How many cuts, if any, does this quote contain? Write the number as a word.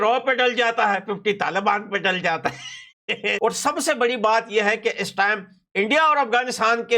one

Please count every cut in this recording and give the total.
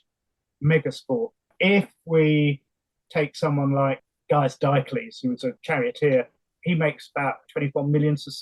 five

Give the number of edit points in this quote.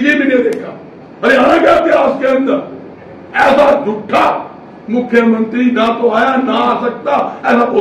zero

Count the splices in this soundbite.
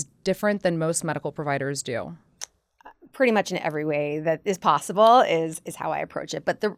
zero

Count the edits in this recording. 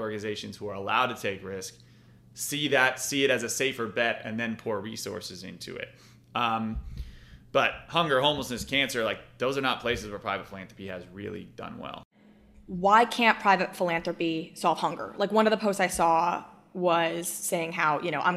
one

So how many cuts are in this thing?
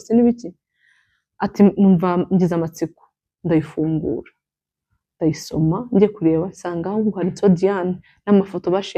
zero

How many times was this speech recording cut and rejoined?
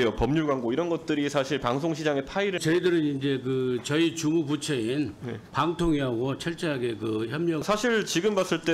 two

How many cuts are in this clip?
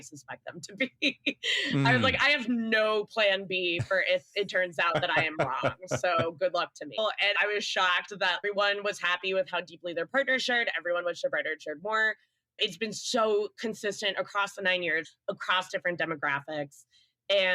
three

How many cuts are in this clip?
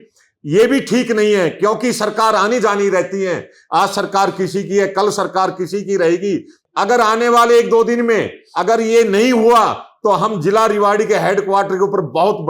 one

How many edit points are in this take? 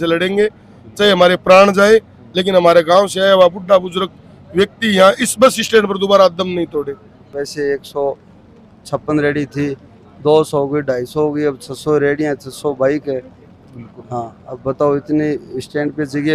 one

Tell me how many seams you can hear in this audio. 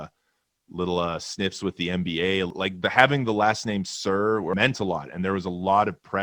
two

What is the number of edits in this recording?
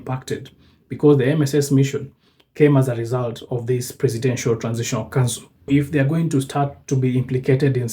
one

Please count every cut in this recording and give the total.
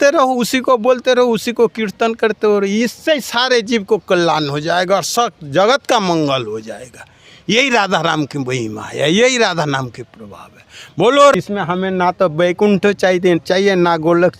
one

